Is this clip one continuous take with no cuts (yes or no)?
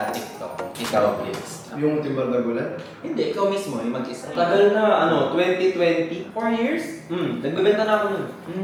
yes